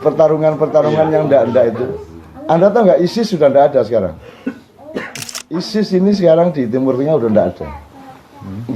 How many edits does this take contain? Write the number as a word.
one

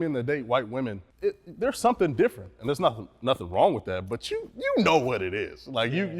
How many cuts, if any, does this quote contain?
one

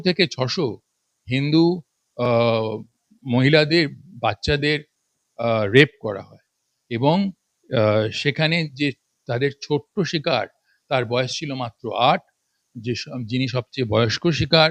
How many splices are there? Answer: zero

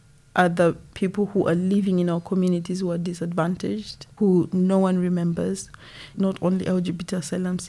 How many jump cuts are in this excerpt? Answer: three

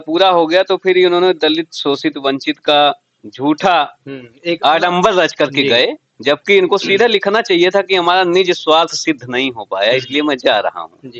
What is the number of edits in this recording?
zero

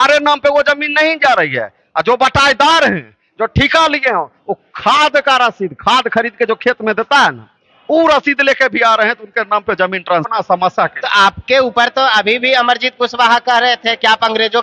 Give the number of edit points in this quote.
one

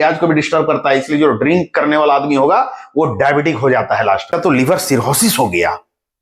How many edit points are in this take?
one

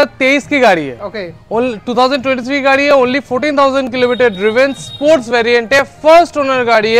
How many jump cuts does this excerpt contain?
zero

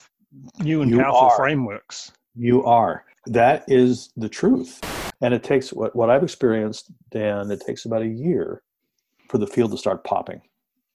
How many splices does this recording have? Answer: two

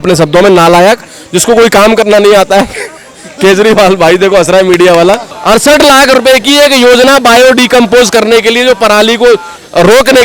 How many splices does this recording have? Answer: one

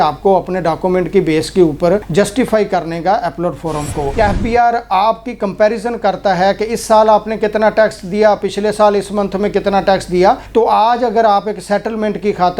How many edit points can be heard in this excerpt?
one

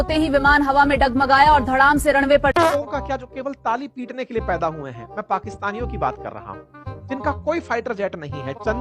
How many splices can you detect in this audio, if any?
one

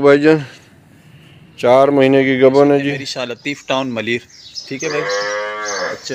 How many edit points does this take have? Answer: one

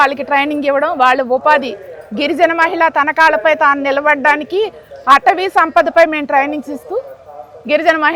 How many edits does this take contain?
zero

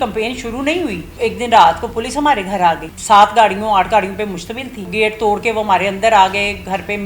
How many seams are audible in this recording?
three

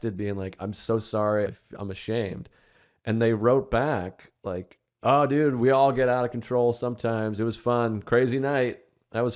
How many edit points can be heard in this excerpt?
one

